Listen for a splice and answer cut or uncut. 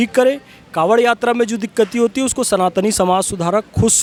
uncut